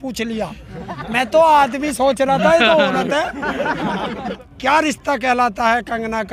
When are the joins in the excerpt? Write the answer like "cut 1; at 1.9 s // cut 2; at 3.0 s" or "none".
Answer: cut 1; at 4.2 s